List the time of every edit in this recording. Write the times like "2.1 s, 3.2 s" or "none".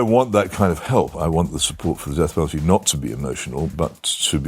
1.1 s, 3.7 s